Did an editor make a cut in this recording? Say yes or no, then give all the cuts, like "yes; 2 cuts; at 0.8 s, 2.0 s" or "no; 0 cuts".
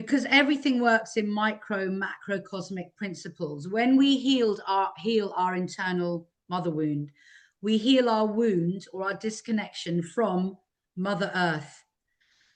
no; 0 cuts